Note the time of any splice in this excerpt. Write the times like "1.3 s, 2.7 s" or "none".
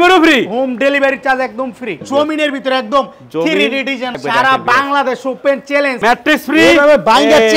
2.0 s, 4.2 s, 6.0 s